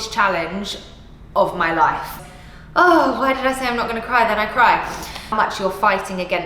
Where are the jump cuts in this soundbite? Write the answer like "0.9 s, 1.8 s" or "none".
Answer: 2.1 s, 5.3 s